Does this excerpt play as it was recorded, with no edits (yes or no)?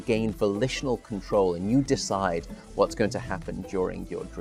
yes